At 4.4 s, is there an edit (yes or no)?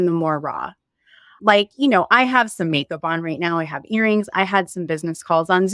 no